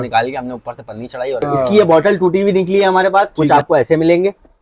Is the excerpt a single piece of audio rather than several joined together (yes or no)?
no